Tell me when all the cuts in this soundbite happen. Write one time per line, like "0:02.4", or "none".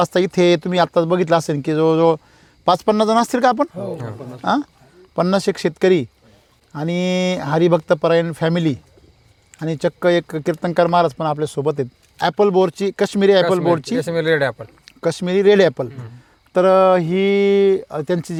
none